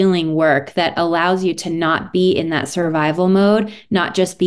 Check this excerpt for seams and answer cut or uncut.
uncut